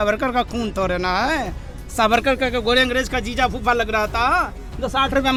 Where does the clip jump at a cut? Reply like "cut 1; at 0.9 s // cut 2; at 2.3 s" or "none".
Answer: none